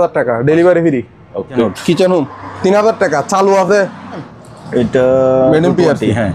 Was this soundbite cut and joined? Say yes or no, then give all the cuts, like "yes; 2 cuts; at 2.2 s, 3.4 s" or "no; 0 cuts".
yes; 2 cuts; at 1.6 s, 4.3 s